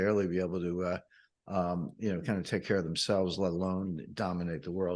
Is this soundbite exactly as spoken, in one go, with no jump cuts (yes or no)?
yes